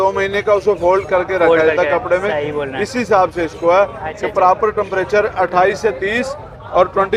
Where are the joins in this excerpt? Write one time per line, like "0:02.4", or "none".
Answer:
none

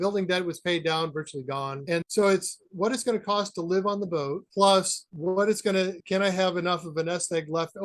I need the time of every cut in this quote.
none

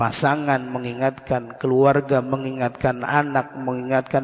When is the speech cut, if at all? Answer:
none

